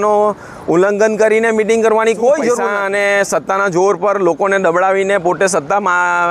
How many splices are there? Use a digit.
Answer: 1